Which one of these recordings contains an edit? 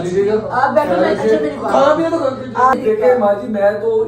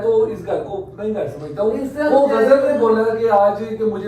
first; 1 cut; at 2.8 s

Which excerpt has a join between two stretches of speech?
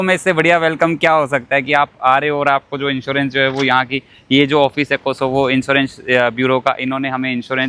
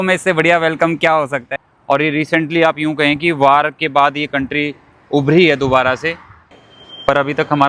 second; 2 cuts; at 1.5 s, 6.7 s

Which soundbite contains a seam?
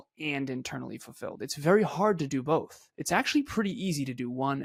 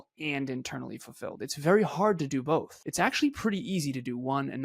second; 1 cut; at 2.8 s

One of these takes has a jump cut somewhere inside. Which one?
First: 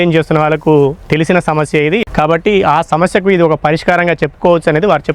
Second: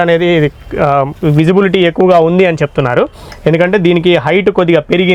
first; 1 cut; at 2.0 s

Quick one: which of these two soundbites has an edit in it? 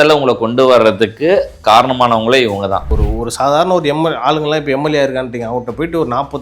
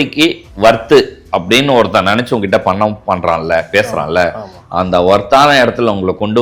first; 1 cut; at 2.9 s

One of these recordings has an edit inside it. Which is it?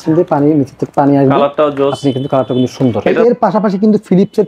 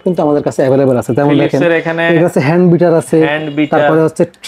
first; 1 cut; at 3.1 s

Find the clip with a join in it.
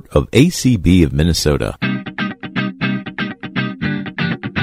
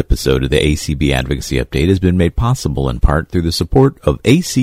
first; 1 cut; at 1.7 s

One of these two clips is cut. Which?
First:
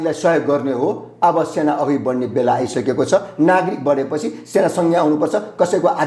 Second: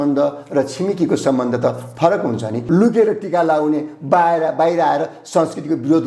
second; 1 cut; at 2.5 s

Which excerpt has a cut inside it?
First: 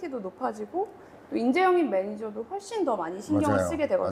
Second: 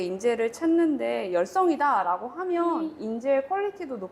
second; 1 cut; at 2.9 s

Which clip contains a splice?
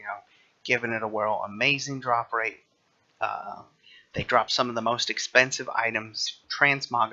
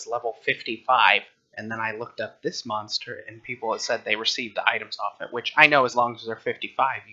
second; 1 cut; at 3.3 s

